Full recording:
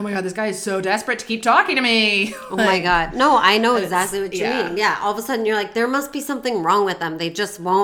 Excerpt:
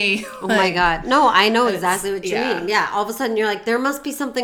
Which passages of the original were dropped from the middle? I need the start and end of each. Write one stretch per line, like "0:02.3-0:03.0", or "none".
none